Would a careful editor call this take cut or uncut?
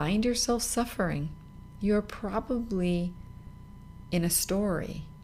uncut